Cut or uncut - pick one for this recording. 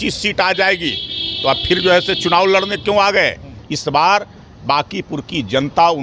cut